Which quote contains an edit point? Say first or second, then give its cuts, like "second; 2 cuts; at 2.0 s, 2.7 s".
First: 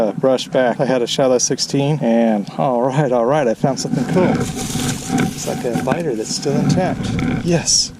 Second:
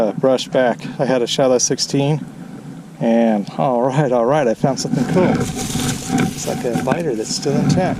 first; 2 cuts; at 0.8 s, 2.0 s